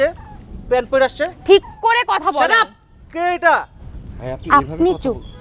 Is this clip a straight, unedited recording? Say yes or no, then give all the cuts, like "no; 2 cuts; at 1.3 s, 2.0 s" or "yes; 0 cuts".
yes; 0 cuts